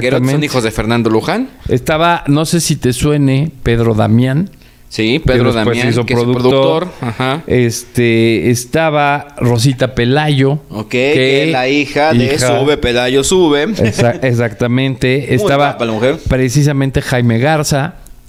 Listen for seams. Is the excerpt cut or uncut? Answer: uncut